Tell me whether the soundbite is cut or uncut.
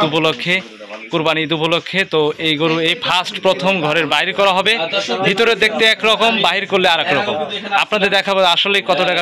uncut